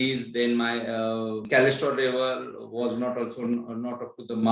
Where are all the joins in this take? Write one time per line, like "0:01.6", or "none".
0:01.5